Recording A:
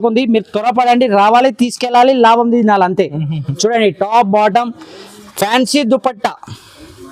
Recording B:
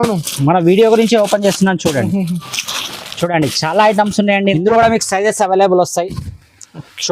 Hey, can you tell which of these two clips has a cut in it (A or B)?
B